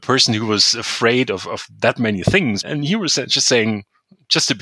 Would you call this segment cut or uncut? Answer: cut